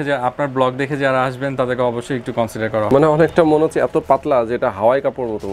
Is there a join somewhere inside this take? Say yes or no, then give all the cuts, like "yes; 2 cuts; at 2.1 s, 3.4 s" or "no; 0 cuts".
yes; 1 cut; at 2.9 s